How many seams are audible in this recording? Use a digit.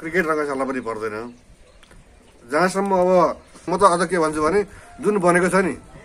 1